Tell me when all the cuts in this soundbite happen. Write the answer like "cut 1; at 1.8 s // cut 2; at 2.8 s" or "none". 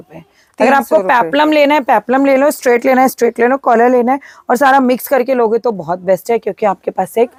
none